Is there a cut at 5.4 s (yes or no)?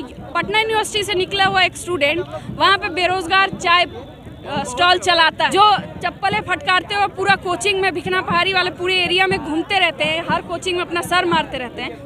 yes